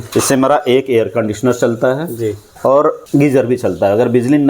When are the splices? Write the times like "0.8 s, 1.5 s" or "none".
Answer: 2.5 s, 3.0 s